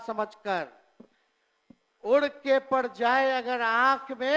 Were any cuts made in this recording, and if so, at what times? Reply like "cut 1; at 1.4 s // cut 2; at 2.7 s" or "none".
none